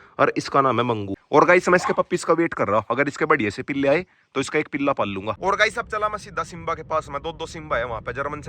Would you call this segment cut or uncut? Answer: cut